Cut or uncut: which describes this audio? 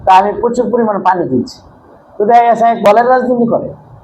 cut